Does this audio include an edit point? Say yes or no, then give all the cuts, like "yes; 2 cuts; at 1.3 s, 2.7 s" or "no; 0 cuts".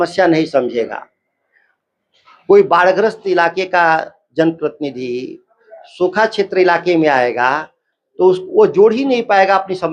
no; 0 cuts